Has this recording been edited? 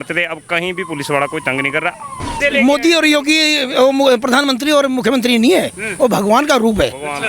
yes; 1 cut; at 2.4 s

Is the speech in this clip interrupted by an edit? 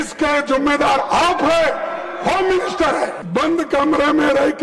yes; 1 cut; at 3.2 s

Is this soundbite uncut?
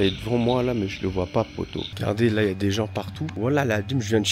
no; 2 cuts; at 1.9 s, 3.2 s

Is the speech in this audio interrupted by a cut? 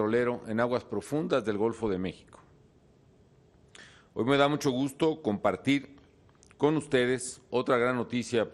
yes; 1 cut; at 1.8 s

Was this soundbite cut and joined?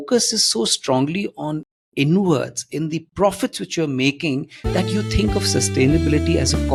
no; 0 cuts

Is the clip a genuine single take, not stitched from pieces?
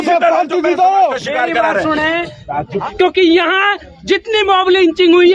no; 1 cut; at 2.8 s

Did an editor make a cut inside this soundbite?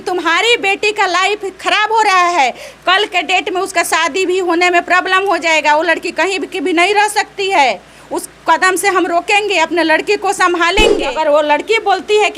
yes; 1 cut; at 11.1 s

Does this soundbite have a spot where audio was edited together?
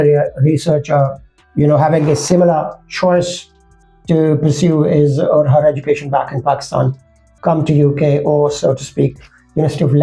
no; 0 cuts

